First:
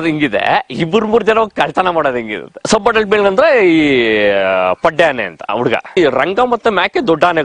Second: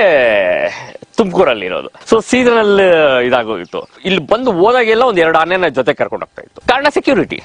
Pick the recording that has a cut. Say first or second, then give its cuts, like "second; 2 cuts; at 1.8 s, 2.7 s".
first; 2 cuts; at 2.6 s, 5.5 s